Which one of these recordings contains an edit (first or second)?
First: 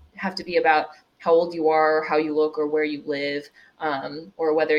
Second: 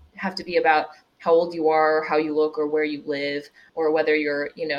second